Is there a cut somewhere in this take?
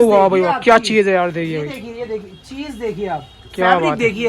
no; 0 cuts

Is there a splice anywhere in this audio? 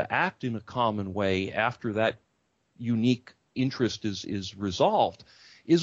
no; 0 cuts

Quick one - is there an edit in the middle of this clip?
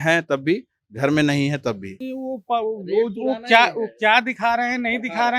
yes; 1 cut; at 2.0 s

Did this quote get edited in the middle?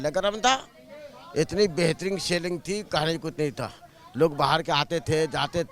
no; 0 cuts

